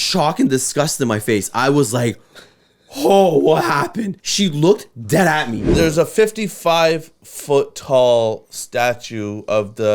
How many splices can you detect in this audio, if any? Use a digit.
2